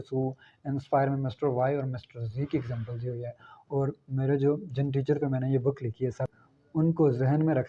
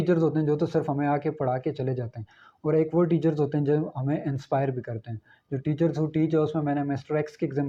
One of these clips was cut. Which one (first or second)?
first